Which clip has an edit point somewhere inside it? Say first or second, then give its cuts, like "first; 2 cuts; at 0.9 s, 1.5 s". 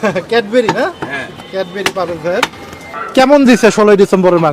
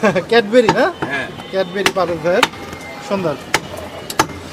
first; 1 cut; at 3.0 s